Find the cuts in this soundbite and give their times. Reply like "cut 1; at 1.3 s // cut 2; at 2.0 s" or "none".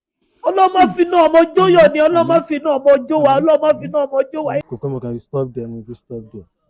cut 1; at 4.7 s